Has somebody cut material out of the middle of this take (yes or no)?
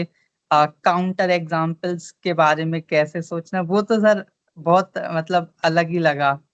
no